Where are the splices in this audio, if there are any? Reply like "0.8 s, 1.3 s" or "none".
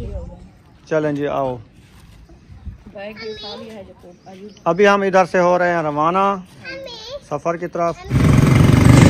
8.0 s